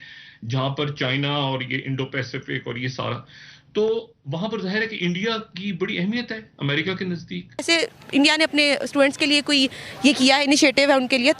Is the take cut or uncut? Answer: cut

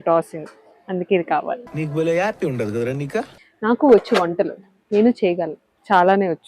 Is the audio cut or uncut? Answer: cut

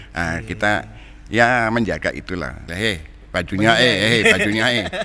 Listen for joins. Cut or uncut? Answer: cut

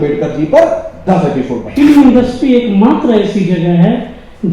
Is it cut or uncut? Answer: cut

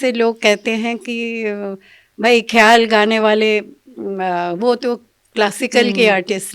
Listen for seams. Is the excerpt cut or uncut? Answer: uncut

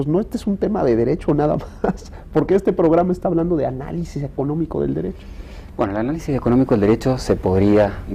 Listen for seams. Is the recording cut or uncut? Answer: cut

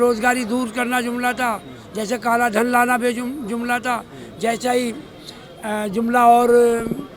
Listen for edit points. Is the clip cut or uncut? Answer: uncut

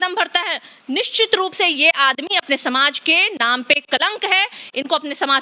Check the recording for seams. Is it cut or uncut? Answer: uncut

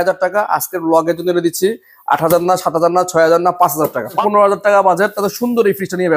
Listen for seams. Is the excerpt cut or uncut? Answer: cut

